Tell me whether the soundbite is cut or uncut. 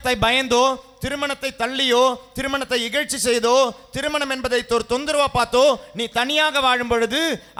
uncut